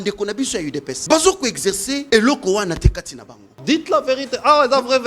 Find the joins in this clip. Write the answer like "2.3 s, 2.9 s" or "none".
0.9 s, 2.0 s, 3.6 s